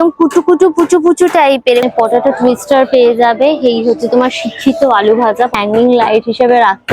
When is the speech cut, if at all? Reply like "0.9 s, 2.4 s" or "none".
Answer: 1.9 s, 5.5 s